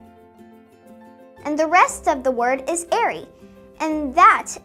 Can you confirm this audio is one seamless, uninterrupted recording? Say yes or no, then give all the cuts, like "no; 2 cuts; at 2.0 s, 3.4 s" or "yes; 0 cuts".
yes; 0 cuts